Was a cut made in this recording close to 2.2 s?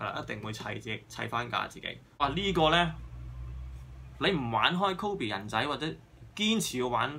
yes; 1 cut; at 2.2 s

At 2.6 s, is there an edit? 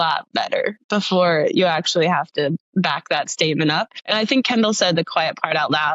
yes; 2 cuts; at 2.6 s, 4.0 s

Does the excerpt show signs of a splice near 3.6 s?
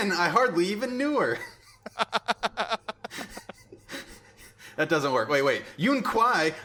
no; 0 cuts

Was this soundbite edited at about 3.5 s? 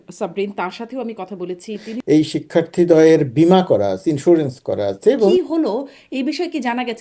no; 2 cuts; at 1.9 s, 5.3 s

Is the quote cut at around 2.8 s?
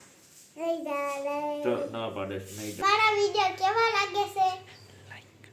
yes; 1 cut; at 2.8 s

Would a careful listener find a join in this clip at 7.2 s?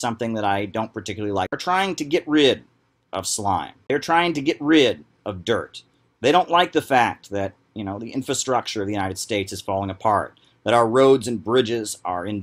no; 2 cuts; at 1.5 s, 3.7 s

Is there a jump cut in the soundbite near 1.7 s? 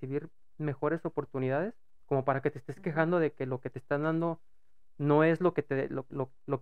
no; 0 cuts

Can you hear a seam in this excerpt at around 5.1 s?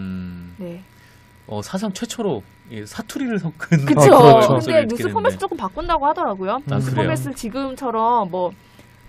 yes; 1 cut; at 5.1 s

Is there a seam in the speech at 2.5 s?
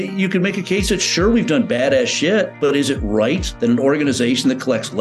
yes; 2 cuts; at 2.5 s, 3.5 s

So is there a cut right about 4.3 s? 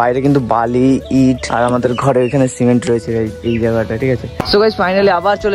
yes; 1 cut; at 4.3 s

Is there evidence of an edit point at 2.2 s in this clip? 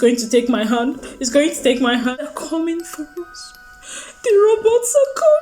yes; 1 cut; at 2.2 s

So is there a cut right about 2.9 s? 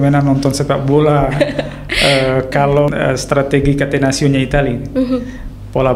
yes; 1 cut; at 2.9 s

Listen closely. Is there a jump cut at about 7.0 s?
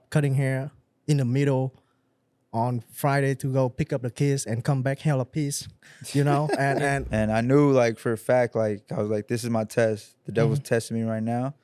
yes; 1 cut; at 7.0 s

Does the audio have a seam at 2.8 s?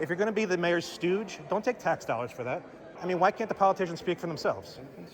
yes; 1 cut; at 2.8 s

